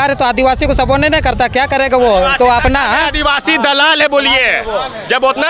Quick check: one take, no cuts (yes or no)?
yes